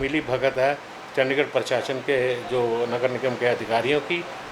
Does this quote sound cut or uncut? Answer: uncut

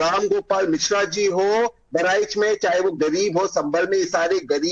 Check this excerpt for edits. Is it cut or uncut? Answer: uncut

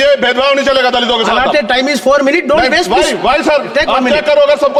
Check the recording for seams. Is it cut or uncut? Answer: uncut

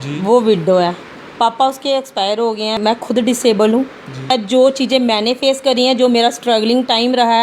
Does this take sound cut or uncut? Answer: cut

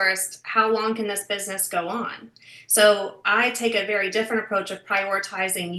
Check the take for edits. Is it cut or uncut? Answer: uncut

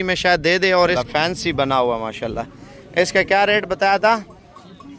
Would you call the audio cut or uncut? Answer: cut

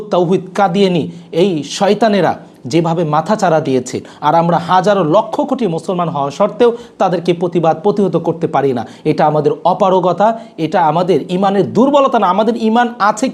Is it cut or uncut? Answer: uncut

